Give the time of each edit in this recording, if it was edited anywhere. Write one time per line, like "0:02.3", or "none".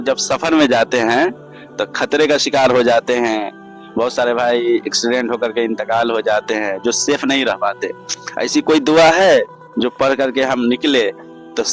none